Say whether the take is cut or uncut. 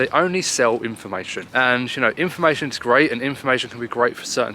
cut